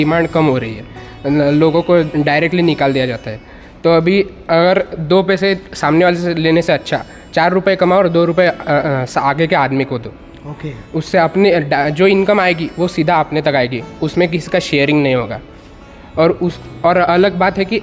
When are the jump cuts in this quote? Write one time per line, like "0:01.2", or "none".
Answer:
none